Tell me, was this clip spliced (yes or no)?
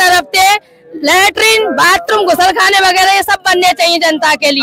no